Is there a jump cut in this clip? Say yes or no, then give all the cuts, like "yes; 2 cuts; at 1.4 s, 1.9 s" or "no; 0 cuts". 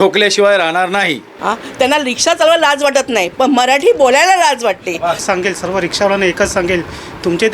yes; 2 cuts; at 1.3 s, 5.2 s